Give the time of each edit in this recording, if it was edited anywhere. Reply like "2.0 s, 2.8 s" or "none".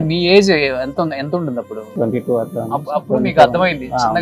1.9 s